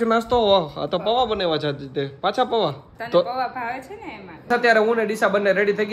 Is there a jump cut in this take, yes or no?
yes